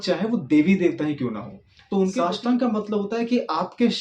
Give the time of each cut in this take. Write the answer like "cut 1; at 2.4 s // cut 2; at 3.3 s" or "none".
cut 1; at 2.2 s